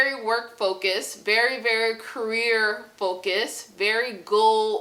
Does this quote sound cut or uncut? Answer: uncut